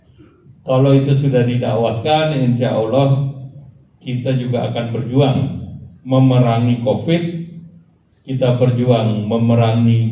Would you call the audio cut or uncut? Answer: uncut